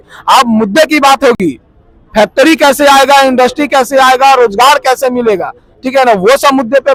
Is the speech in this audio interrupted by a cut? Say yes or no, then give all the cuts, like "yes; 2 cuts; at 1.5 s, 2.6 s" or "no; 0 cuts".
no; 0 cuts